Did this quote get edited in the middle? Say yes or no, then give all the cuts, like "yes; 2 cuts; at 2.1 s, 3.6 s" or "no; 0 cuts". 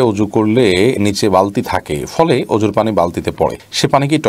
no; 0 cuts